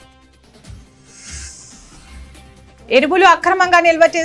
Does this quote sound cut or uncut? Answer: uncut